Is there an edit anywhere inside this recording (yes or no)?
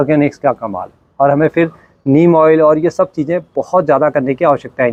no